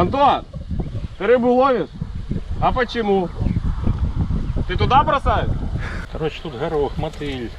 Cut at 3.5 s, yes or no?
no